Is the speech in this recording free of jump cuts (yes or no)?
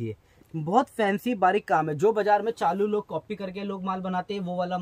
yes